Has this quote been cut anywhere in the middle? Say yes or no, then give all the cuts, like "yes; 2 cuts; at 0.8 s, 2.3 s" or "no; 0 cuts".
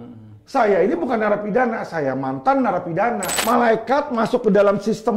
yes; 1 cut; at 3.3 s